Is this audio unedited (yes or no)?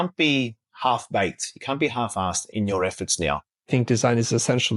no